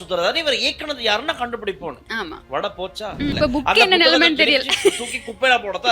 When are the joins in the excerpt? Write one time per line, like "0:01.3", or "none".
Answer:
0:03.3